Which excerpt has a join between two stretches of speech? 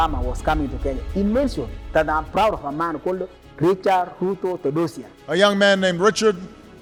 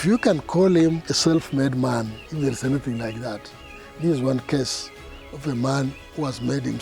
second; 2 cuts; at 1.1 s, 2.2 s

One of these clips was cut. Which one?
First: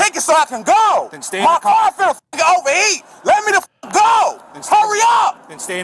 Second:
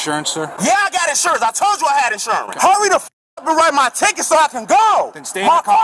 second; 1 cut; at 2.5 s

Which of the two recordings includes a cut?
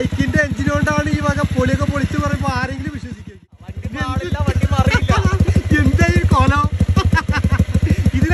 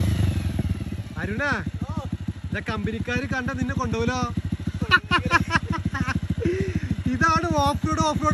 first; 1 cut; at 3.3 s

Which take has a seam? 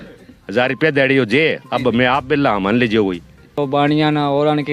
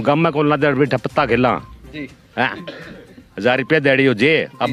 first; 1 cut; at 3.5 s

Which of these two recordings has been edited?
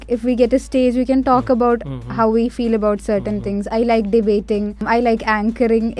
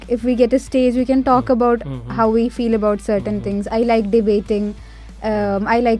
first; 1 cut; at 4.8 s

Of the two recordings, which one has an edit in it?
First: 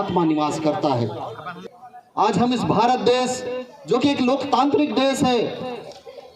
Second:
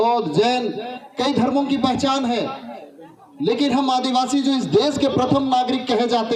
first; 1 cut; at 1.5 s

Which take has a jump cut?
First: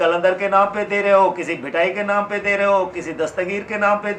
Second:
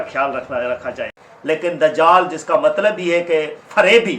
second; 1 cut; at 1.6 s

